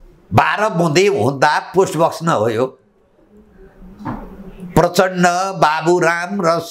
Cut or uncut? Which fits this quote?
uncut